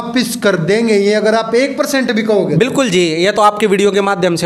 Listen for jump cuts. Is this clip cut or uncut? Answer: uncut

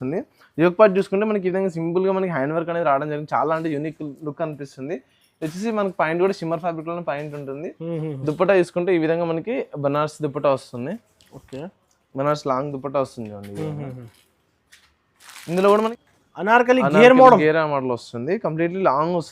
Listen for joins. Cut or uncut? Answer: cut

